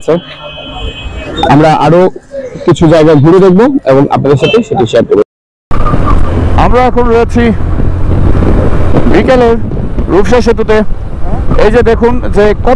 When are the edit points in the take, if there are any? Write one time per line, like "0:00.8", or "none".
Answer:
0:05.3